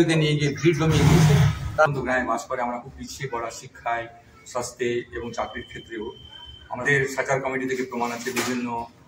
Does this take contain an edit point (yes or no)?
yes